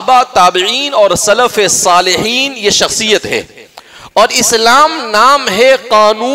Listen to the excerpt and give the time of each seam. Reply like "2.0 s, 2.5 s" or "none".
none